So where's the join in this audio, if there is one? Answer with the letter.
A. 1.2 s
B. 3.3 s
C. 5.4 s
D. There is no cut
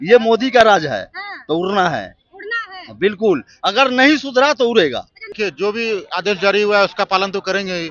C